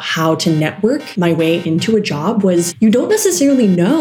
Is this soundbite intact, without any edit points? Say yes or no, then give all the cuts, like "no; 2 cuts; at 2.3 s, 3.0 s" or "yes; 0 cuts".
no; 2 cuts; at 1.1 s, 2.7 s